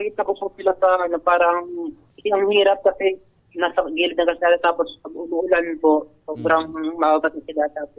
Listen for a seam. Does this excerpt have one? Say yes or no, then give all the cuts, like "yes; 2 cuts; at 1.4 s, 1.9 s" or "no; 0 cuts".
no; 0 cuts